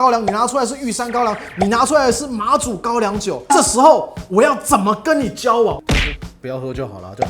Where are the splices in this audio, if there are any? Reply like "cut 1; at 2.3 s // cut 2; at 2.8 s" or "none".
cut 1; at 5.8 s